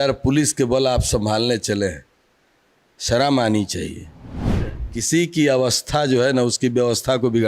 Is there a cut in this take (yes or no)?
yes